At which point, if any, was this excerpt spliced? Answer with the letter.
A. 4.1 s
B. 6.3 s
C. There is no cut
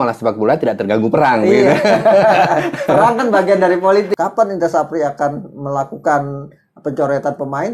A